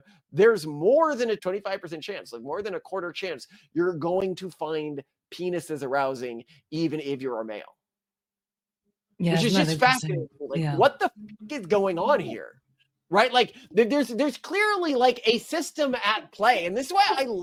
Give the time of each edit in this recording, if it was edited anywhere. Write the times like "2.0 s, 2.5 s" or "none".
none